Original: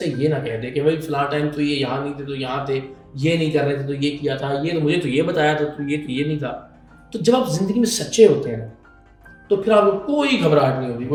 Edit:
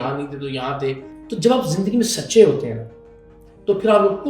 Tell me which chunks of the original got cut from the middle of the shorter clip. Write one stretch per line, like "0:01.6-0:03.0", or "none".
0:03.0-0:07.0